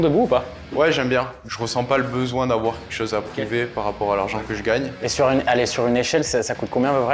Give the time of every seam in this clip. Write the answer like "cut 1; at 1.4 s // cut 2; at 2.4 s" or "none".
cut 1; at 1.4 s // cut 2; at 4.9 s